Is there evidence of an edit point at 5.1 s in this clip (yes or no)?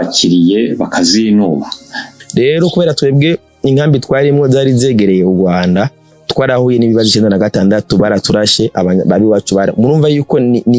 no